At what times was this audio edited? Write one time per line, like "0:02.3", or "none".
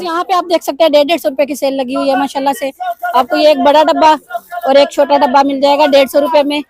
none